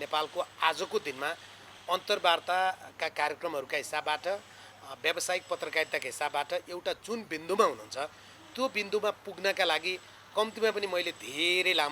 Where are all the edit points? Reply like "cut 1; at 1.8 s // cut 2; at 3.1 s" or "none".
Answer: none